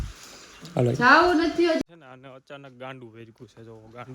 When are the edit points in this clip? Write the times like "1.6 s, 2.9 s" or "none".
1.8 s